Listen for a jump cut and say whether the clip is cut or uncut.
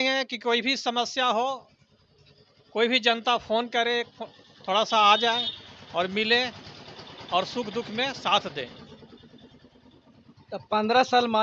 uncut